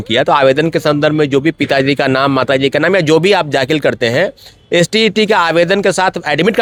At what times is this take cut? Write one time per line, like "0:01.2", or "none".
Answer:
none